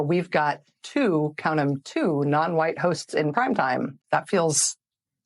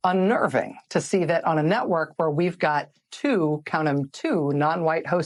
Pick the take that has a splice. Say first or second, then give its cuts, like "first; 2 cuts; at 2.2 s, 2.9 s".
first; 1 cut; at 4.0 s